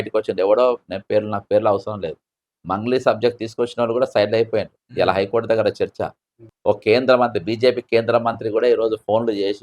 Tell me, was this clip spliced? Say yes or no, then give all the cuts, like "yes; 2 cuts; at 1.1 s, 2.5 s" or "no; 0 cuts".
yes; 1 cut; at 6.5 s